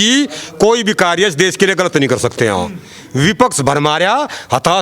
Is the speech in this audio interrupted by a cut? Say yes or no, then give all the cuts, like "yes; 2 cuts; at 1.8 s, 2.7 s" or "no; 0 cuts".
no; 0 cuts